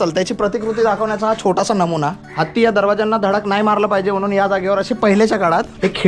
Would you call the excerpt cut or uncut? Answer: cut